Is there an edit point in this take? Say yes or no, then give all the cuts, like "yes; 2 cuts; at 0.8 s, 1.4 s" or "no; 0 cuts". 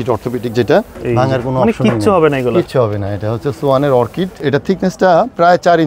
yes; 2 cuts; at 0.9 s, 4.4 s